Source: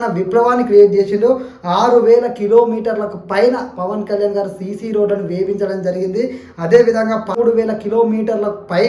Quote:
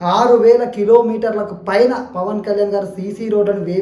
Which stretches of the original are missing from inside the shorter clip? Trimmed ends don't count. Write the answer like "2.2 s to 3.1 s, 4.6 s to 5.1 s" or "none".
none